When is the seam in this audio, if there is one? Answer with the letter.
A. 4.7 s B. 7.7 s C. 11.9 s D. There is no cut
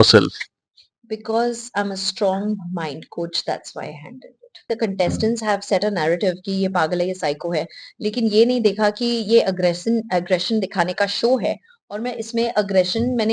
A